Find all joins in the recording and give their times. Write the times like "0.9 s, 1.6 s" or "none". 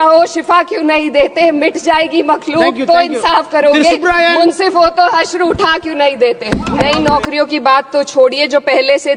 6.7 s